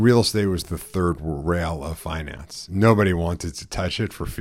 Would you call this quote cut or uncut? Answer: uncut